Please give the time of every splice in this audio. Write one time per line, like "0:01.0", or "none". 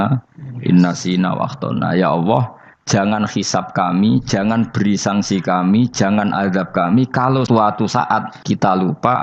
0:07.5
0:08.3